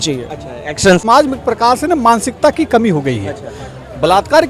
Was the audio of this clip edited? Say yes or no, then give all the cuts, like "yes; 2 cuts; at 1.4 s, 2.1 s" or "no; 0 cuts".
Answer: yes; 1 cut; at 1.0 s